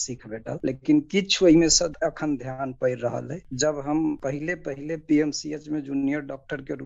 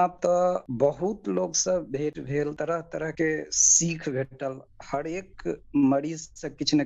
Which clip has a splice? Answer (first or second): first